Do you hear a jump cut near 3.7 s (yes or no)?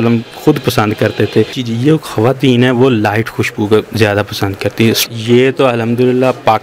no